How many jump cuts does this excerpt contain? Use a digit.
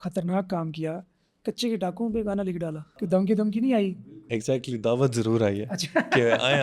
2